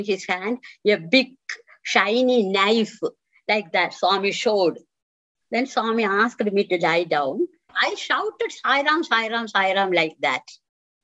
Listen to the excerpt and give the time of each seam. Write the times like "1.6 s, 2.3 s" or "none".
7.8 s